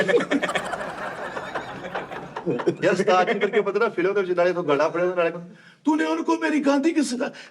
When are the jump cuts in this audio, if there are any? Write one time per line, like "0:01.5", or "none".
0:02.8